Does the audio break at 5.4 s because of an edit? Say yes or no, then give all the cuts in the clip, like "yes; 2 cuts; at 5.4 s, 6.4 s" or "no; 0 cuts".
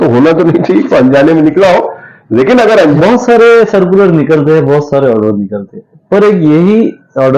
no; 1 cut; at 3.0 s